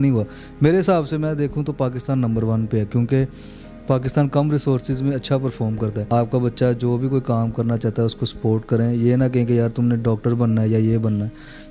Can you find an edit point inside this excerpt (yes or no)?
yes